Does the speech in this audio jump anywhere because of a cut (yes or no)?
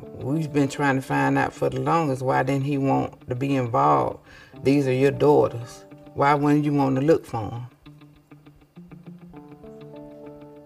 yes